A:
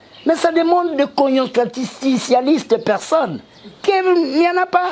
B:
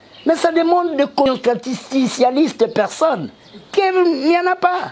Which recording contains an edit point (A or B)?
B